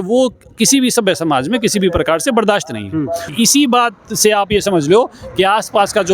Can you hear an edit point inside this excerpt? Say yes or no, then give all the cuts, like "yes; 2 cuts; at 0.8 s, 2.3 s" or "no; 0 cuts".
yes; 1 cut; at 3.3 s